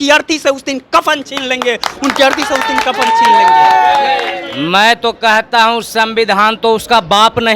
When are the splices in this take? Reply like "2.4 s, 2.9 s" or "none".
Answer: 4.4 s